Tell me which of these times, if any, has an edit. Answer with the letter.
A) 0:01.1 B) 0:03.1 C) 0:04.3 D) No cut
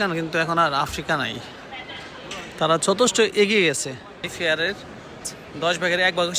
C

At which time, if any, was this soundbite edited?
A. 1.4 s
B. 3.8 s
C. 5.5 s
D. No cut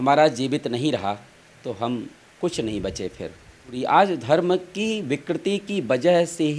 B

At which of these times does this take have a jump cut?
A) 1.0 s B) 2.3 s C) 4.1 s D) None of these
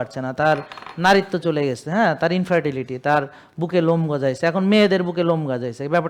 D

